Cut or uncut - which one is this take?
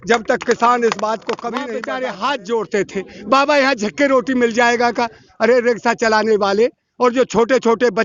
cut